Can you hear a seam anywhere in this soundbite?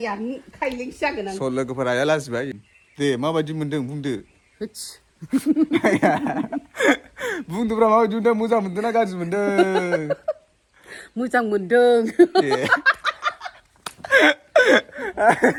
no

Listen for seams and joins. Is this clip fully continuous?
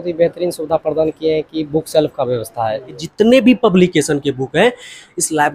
no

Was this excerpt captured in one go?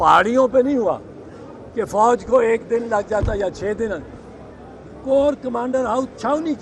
yes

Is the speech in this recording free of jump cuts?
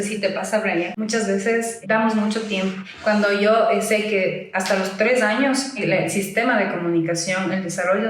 no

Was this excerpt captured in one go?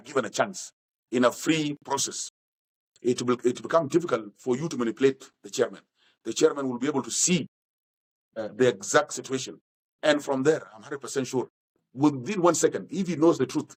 yes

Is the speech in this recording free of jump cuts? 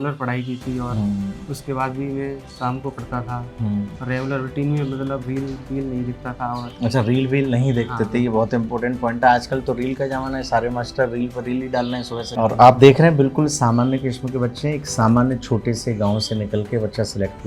no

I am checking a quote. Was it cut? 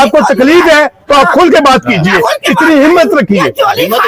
no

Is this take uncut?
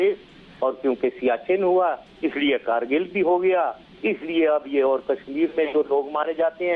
no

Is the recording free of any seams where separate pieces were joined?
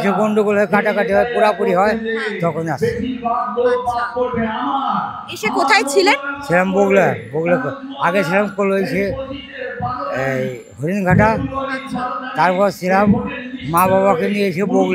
yes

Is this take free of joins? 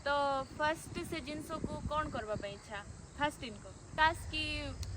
no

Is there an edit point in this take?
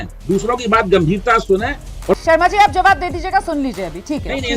yes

